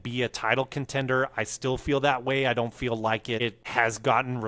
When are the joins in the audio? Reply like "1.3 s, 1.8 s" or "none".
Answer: 3.6 s